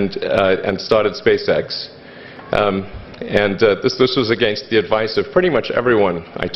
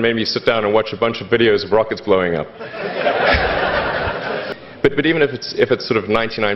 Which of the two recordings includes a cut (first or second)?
second